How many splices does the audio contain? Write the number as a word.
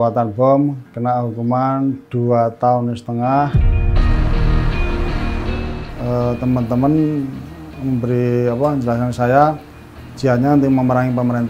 one